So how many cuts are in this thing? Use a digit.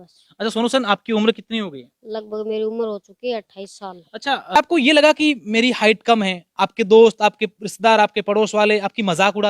1